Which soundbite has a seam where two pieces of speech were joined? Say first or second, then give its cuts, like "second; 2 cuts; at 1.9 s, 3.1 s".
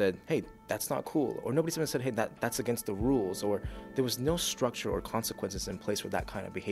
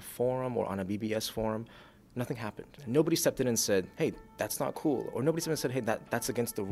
second; 1 cut; at 2.8 s